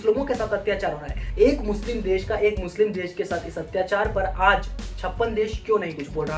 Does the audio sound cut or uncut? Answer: cut